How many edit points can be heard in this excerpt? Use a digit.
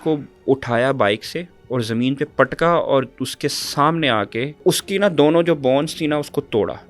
2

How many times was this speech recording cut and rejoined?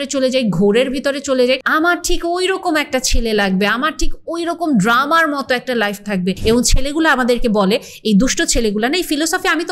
2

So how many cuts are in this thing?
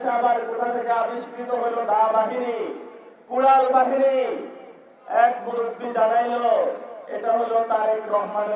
0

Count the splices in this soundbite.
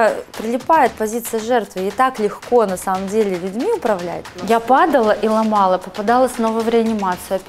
1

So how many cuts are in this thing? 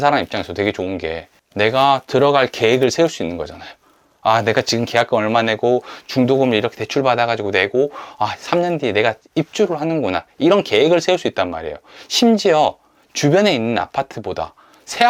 0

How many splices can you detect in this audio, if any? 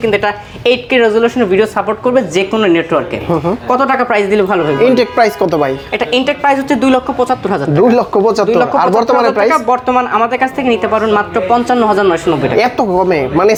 0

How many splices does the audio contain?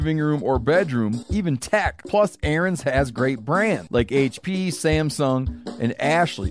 0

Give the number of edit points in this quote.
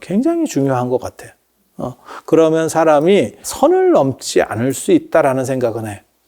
1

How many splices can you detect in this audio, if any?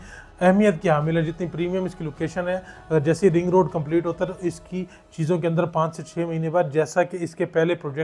0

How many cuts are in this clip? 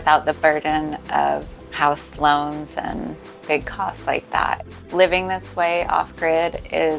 1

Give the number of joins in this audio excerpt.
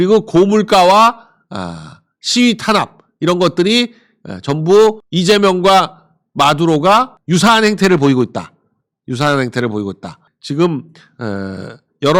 0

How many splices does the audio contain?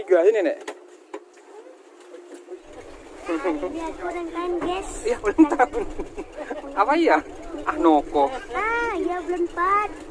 1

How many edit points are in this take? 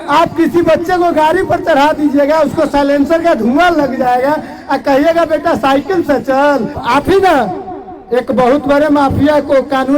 1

